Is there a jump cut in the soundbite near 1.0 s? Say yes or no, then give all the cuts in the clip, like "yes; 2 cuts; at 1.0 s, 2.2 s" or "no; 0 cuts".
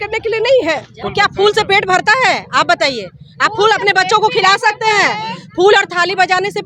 yes; 1 cut; at 1.0 s